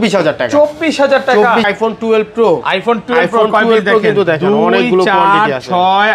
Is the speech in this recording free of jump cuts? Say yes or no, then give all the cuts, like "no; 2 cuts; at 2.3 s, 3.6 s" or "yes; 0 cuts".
no; 1 cut; at 1.7 s